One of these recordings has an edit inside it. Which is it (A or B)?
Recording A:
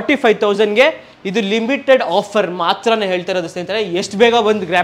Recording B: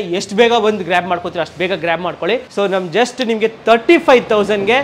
B